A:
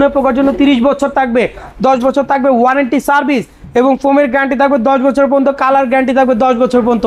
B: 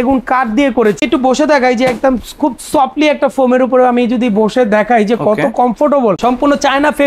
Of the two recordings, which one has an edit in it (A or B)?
B